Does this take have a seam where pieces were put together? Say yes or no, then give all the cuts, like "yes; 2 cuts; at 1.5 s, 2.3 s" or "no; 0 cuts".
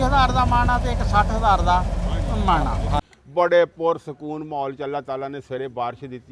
yes; 1 cut; at 3.0 s